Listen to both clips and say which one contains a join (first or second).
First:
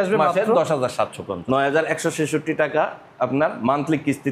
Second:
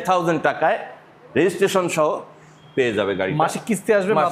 first